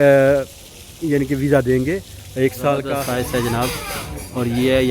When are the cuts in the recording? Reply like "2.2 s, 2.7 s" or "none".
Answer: 2.9 s